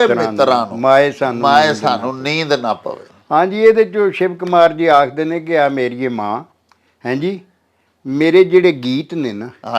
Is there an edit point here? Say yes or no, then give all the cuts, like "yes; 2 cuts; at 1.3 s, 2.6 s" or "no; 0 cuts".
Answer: no; 0 cuts